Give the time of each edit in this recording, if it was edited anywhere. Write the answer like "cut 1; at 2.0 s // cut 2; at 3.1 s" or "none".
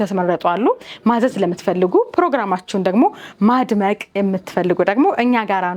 none